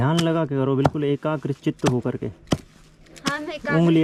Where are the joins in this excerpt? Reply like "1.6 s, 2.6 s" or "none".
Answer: none

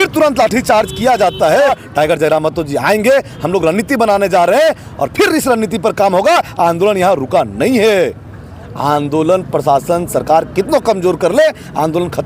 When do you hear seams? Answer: 1.7 s

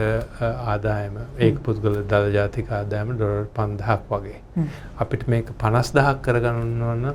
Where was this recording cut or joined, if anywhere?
none

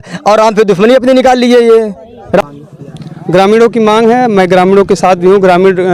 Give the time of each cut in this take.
2.4 s

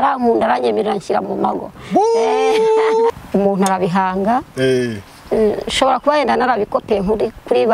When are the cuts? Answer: 3.2 s

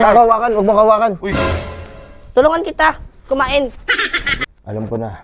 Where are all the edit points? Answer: 4.3 s

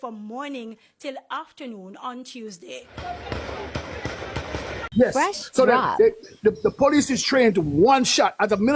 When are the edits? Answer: 4.9 s

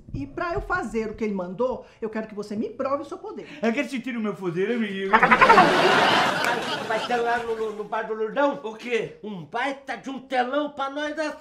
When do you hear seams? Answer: 6.3 s

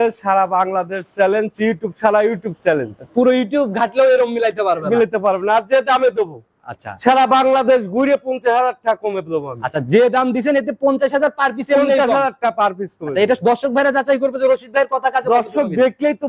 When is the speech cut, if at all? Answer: none

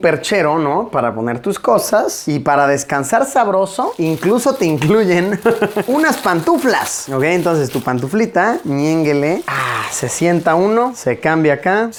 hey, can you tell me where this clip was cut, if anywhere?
none

